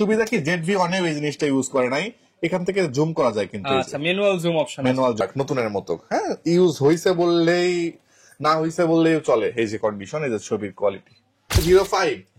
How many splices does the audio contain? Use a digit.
2